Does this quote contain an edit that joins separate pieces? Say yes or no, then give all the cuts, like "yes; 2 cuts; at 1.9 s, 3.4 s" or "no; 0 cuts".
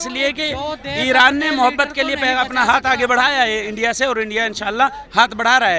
no; 0 cuts